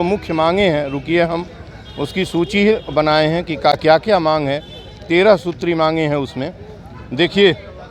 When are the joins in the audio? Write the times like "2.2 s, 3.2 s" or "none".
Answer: none